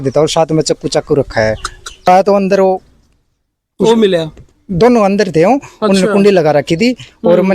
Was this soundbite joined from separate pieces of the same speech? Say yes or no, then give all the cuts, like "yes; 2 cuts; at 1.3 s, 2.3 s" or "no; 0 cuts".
yes; 1 cut; at 2.1 s